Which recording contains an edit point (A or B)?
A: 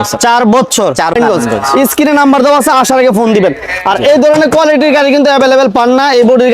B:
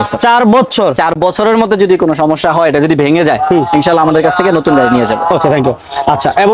A